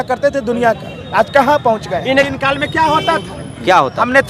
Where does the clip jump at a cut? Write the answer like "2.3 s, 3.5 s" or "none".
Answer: 2.3 s